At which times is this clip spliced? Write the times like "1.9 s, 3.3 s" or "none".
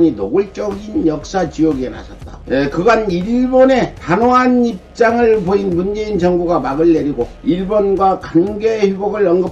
none

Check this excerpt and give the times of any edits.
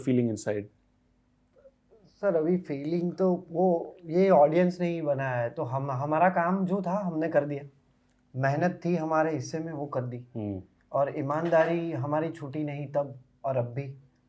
none

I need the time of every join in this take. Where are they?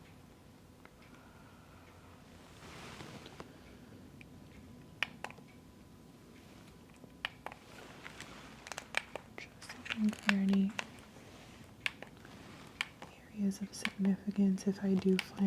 2.6 s

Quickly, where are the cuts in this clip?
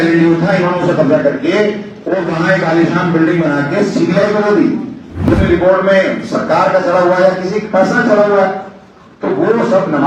5.4 s

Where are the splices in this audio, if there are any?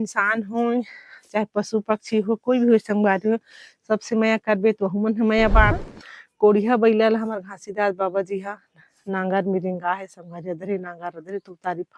5.8 s

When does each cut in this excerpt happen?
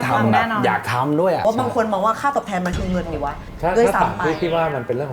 1.4 s

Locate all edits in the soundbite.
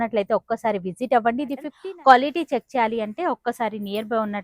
1.7 s

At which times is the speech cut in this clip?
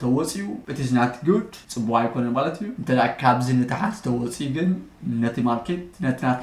2.7 s

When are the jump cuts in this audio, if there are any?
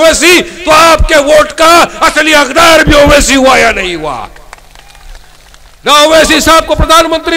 5.9 s

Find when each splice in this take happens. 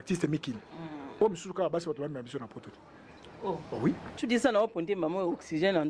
4.2 s

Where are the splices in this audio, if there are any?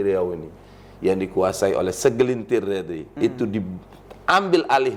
3.1 s

